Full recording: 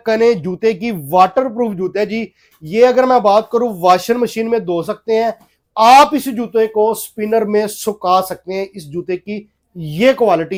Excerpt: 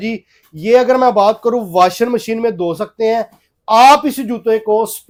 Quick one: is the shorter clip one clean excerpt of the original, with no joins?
yes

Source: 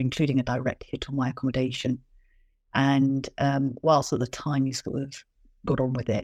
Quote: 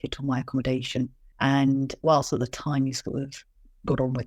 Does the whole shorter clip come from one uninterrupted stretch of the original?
no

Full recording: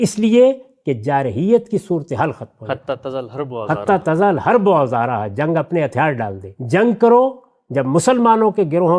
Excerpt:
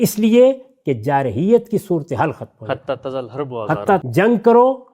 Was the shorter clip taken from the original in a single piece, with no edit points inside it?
no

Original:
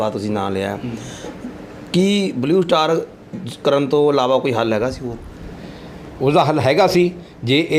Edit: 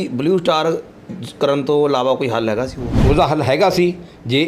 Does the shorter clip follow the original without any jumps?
no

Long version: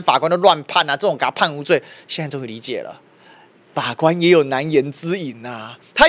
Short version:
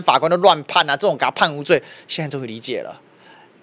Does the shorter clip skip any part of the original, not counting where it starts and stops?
no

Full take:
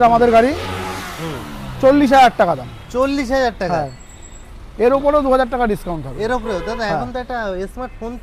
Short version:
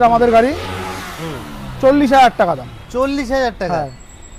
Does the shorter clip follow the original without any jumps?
yes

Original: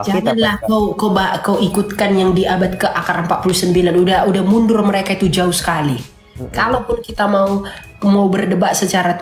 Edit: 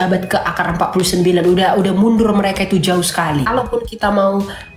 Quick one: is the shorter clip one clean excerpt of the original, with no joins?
no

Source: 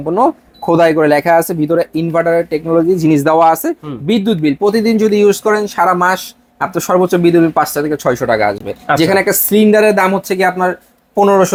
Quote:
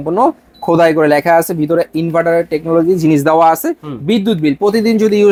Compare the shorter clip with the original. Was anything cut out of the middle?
no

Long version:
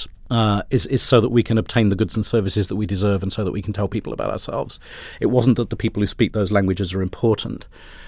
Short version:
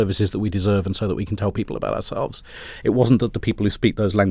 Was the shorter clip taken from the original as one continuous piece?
yes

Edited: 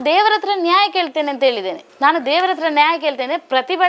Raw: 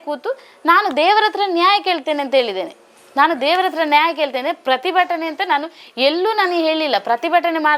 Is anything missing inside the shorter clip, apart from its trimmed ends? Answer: yes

